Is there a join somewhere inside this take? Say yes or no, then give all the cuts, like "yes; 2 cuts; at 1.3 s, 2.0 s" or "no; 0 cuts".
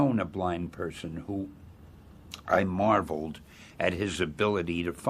yes; 1 cut; at 4.2 s